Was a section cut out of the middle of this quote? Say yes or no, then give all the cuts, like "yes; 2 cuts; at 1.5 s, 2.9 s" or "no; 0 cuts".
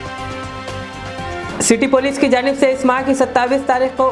yes; 1 cut; at 1.5 s